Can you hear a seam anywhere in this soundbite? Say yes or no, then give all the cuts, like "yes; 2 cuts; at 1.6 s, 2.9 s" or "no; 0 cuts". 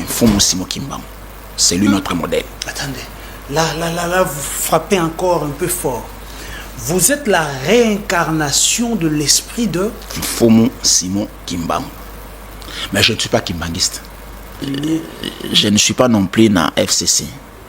yes; 1 cut; at 14.5 s